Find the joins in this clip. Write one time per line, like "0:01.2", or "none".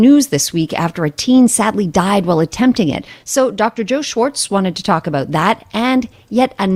none